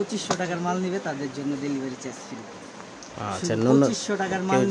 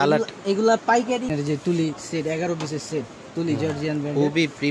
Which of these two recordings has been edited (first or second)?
second